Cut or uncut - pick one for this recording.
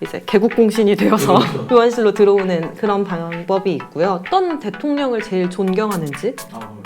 cut